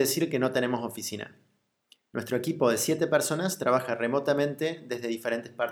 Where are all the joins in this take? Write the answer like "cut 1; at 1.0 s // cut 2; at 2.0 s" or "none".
cut 1; at 4.8 s